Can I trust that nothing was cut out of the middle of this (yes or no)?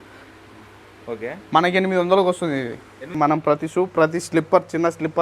no